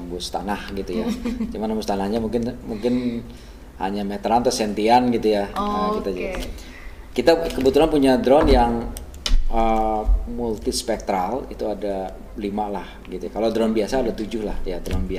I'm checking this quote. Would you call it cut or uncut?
uncut